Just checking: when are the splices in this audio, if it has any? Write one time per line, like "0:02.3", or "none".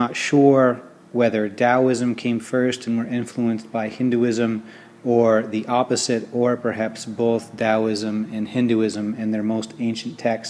0:09.2